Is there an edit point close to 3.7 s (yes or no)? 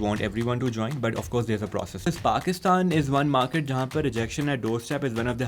no